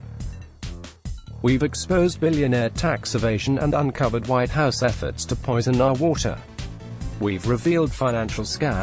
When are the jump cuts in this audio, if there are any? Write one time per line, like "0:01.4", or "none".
0:01.4